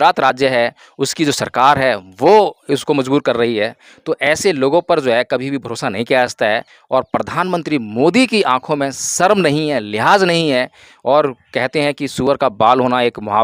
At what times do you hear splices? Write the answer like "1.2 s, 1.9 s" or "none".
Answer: none

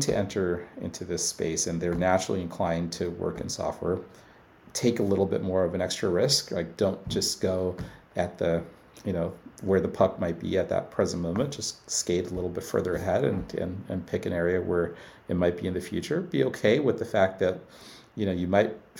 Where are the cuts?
none

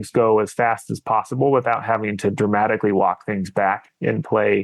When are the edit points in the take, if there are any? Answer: none

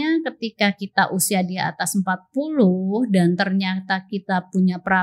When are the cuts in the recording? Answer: none

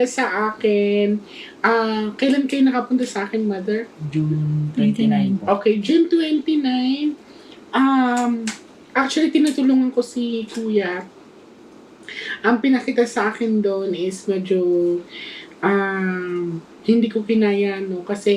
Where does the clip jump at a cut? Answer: 7.0 s

